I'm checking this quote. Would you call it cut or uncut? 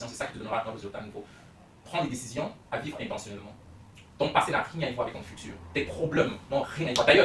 uncut